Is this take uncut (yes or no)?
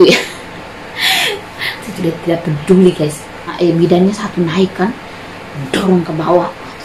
no